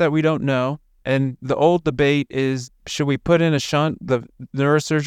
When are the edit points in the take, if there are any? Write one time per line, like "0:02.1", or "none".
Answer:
none